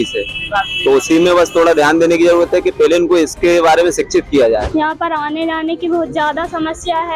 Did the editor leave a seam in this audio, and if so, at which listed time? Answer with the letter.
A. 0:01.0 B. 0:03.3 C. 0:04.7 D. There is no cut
C